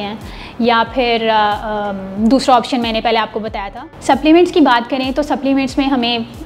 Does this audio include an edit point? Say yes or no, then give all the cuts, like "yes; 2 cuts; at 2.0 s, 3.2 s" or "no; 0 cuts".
yes; 1 cut; at 3.6 s